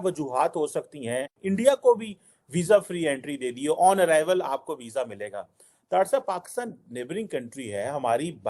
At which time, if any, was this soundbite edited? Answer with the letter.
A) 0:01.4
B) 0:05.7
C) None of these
A